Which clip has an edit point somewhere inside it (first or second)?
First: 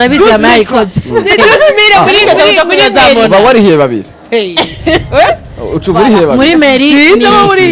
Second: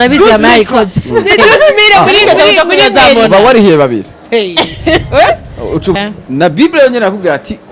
second